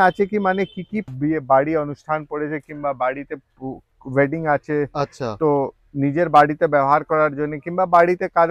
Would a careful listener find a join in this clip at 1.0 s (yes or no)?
yes